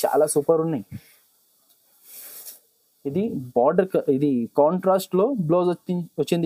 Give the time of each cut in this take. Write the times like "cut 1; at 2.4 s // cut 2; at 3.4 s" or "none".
none